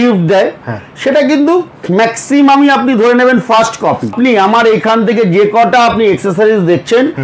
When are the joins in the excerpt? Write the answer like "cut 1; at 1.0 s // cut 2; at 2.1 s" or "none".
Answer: cut 1; at 4.1 s